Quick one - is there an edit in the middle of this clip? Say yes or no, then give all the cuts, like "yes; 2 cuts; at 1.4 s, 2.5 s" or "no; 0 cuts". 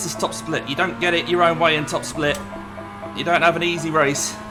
no; 0 cuts